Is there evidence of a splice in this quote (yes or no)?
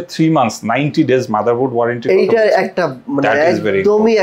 no